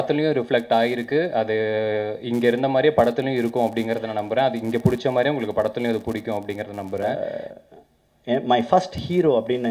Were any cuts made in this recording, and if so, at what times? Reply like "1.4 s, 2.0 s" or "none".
7.1 s